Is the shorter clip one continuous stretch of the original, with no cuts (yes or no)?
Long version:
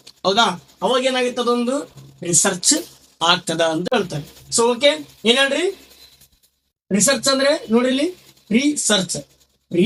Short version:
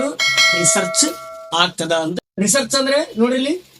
no